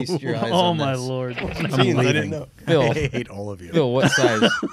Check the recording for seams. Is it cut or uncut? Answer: cut